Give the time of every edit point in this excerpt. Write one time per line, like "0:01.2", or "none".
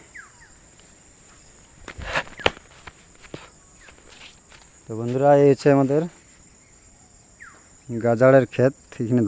none